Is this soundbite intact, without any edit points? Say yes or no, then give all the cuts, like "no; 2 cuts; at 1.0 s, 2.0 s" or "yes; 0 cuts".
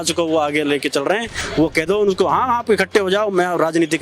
no; 1 cut; at 1.4 s